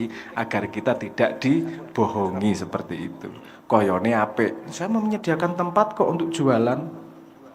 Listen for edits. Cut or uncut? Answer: uncut